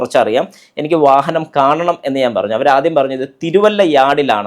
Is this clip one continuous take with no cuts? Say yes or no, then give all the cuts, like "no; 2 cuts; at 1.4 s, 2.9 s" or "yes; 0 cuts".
yes; 0 cuts